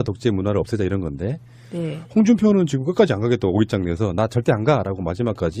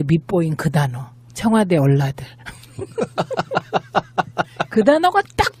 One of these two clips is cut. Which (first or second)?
second